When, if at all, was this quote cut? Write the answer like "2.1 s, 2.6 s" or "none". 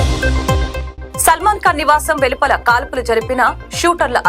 none